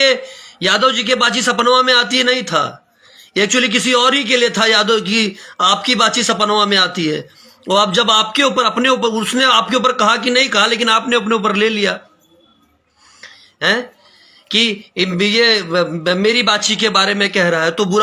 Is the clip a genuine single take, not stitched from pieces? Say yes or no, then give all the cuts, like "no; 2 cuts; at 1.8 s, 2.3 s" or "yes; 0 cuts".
yes; 0 cuts